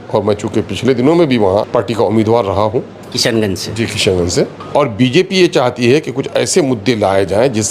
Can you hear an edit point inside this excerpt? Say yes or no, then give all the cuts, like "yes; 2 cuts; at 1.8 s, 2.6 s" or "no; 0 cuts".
yes; 2 cuts; at 1.7 s, 4.6 s